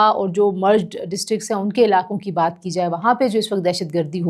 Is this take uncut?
yes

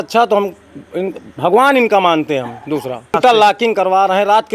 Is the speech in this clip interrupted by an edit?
yes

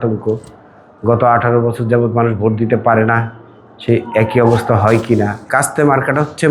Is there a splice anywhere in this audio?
no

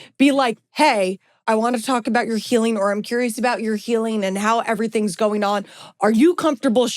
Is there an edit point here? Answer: yes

